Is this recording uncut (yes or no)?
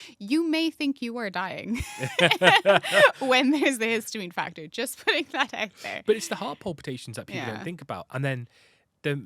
yes